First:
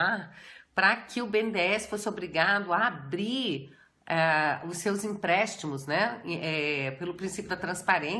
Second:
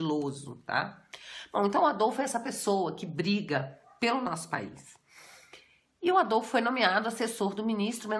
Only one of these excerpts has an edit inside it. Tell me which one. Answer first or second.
second